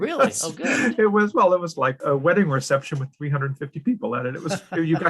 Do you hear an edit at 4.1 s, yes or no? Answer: no